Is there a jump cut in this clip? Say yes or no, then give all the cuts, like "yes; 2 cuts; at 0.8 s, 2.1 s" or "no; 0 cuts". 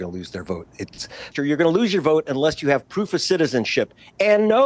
yes; 1 cut; at 1.3 s